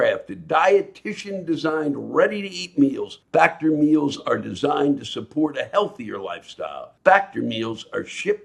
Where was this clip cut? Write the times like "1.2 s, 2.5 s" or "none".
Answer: 3.1 s, 6.9 s